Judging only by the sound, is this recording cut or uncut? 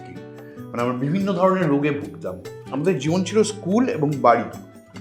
cut